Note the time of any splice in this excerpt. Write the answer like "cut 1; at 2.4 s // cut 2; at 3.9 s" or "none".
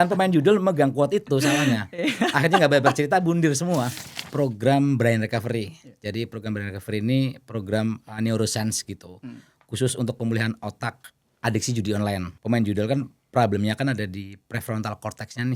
cut 1; at 4.2 s // cut 2; at 12.3 s